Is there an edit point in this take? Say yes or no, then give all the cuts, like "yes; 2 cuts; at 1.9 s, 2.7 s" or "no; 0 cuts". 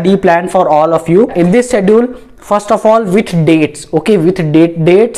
no; 0 cuts